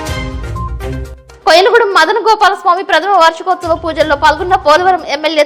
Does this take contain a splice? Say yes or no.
no